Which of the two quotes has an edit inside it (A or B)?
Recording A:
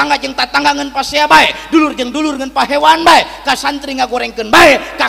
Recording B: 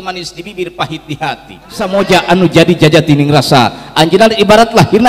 B